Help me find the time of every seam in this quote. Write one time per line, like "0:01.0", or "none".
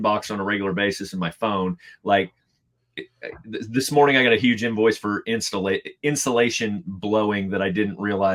none